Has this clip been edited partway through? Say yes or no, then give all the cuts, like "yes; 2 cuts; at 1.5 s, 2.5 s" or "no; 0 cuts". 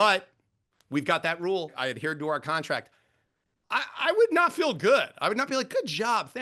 yes; 1 cut; at 1.7 s